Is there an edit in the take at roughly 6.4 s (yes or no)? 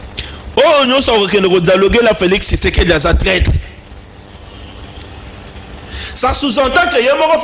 no